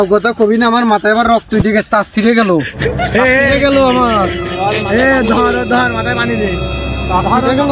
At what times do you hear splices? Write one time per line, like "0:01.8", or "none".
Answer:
none

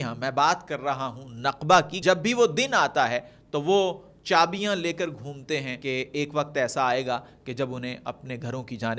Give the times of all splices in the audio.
0:02.0
0:05.7

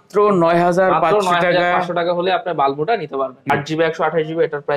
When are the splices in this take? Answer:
0:03.5

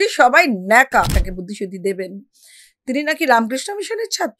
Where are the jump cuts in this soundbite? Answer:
0:01.2

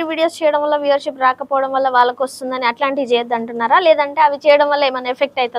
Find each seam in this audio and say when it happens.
none

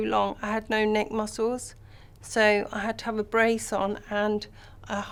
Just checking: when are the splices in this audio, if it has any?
none

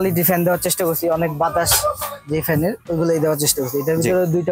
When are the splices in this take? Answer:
none

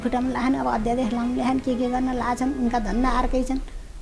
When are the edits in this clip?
none

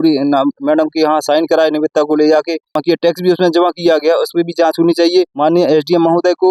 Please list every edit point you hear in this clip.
0:02.8
0:05.3

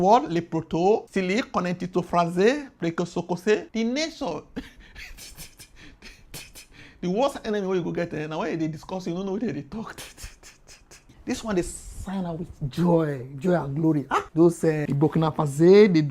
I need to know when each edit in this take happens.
0:11.1

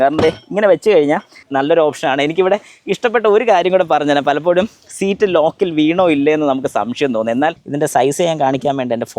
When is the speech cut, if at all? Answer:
0:01.4
0:07.6

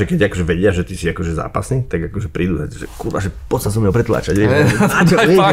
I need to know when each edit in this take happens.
none

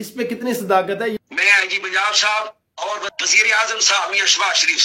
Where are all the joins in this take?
0:01.1

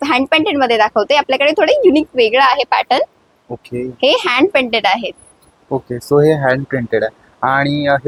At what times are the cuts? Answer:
none

